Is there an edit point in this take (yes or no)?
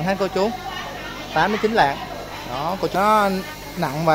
yes